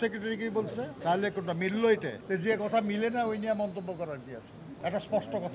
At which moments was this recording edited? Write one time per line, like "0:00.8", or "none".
0:00.9
0:02.1
0:04.6